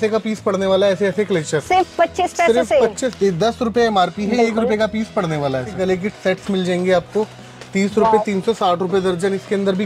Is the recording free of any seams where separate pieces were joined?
no; 2 cuts; at 3.1 s, 5.7 s

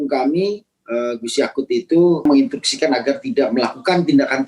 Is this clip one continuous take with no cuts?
no; 1 cut; at 2.2 s

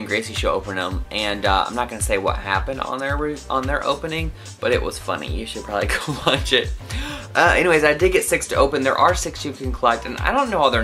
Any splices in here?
no; 0 cuts

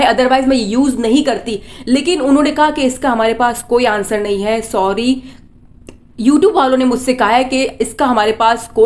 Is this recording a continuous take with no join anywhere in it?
yes; 0 cuts

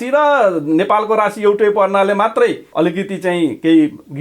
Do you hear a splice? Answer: yes; 1 cut; at 2.6 s

